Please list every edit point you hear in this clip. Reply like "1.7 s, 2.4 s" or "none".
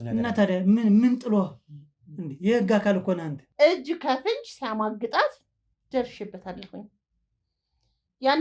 3.4 s